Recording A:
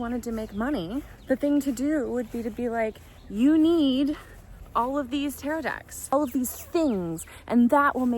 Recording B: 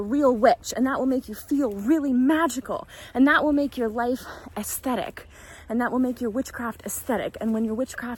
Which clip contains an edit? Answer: A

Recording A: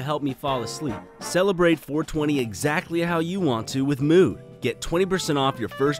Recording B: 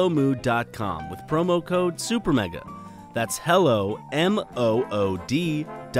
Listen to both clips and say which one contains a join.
A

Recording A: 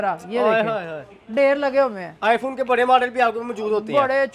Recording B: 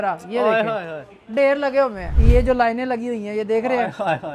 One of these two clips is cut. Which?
B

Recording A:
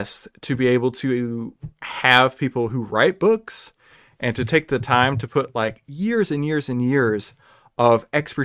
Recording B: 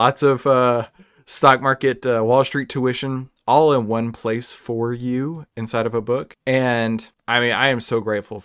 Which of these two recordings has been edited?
B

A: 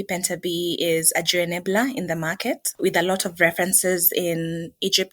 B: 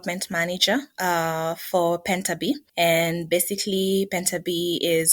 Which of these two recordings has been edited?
A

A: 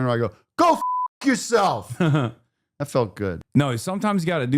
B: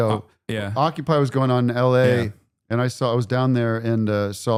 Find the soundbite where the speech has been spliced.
A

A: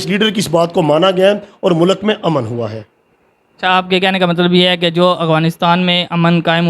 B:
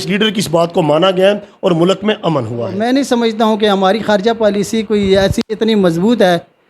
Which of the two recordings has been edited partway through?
B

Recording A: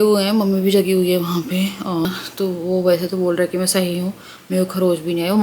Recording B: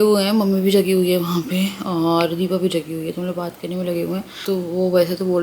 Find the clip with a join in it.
A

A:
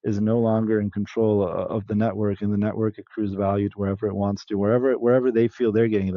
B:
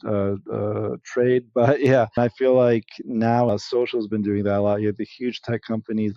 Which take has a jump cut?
B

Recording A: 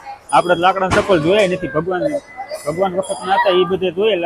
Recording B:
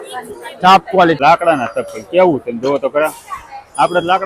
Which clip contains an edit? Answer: B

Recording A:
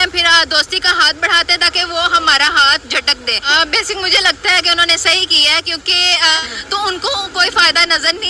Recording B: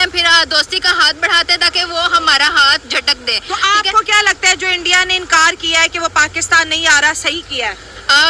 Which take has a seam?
A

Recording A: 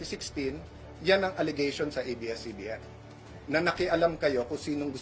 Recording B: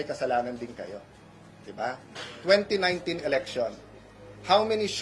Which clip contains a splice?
B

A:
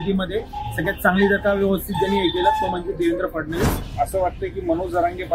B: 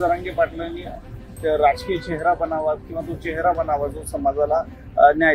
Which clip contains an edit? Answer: A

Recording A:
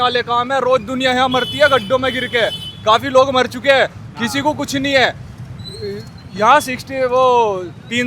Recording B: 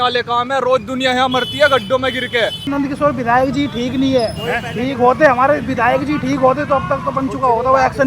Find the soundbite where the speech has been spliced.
B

